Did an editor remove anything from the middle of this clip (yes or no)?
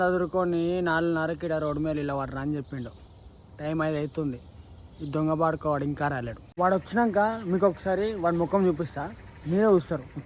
yes